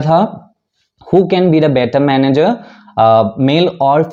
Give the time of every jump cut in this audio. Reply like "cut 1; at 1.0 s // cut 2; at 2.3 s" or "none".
none